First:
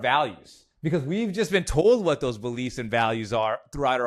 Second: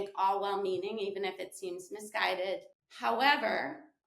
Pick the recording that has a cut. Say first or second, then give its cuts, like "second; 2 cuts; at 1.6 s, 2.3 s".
second; 1 cut; at 2.8 s